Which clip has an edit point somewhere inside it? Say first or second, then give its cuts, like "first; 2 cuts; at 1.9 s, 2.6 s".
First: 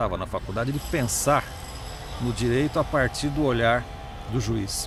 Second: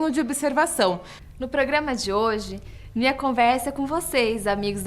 second; 1 cut; at 1.1 s